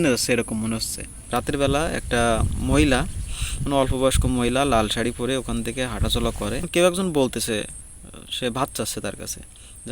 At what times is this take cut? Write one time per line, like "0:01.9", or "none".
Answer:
0:01.1
0:06.7

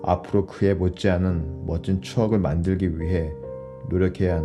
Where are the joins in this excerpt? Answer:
none

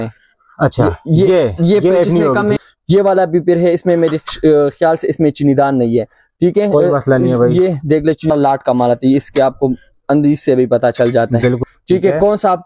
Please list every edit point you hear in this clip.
0:02.6
0:08.3
0:11.6

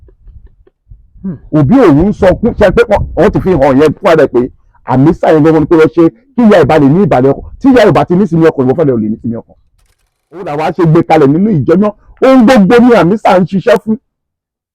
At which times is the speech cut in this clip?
0:10.5

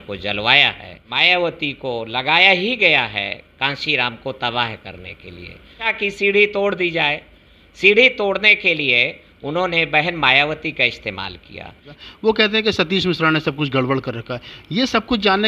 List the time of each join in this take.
0:01.1
0:05.9
0:11.9

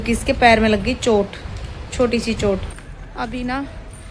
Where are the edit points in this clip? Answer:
0:02.7

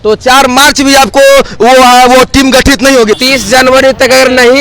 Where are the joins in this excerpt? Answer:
0:03.2

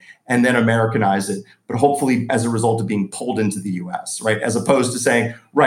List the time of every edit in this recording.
0:02.3

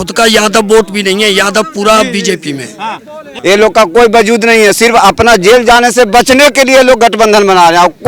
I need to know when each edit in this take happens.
0:03.3

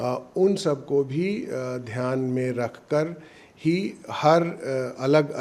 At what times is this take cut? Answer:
none

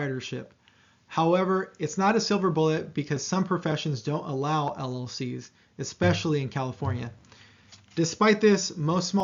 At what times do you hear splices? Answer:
none

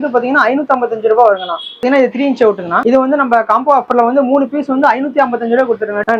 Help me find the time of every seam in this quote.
none

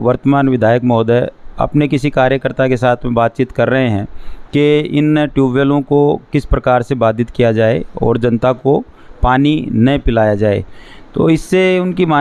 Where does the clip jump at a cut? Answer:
none

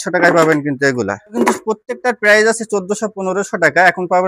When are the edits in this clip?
0:01.3

